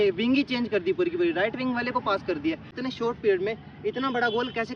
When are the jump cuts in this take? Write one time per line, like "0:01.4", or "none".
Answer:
0:02.7

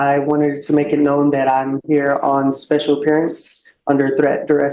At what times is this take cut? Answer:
none

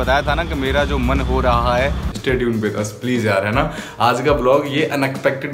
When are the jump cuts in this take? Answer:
0:02.1

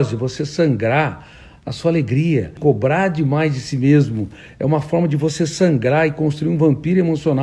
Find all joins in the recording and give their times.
0:02.6

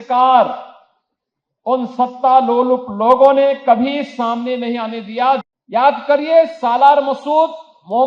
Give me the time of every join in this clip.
0:05.4

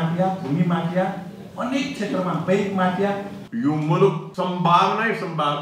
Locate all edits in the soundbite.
0:03.4
0:04.3

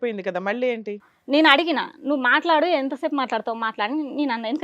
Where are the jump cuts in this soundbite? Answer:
0:01.1

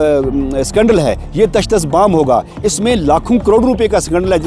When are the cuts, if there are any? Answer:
none

